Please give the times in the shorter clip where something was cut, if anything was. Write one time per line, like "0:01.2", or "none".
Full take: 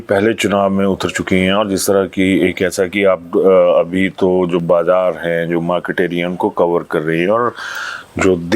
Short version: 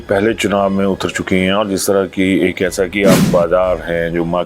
0:03.2